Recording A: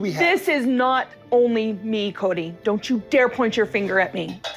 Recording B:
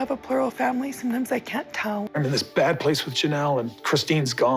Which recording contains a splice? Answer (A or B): B